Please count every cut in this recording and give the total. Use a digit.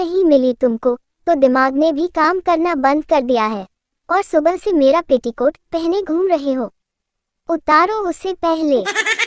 0